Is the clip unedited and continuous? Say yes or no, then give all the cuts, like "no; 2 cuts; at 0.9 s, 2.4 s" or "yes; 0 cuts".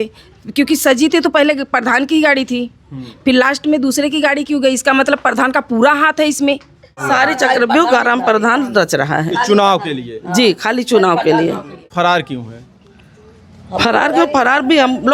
no; 2 cuts; at 7.0 s, 11.9 s